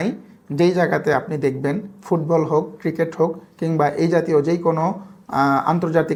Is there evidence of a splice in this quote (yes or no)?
no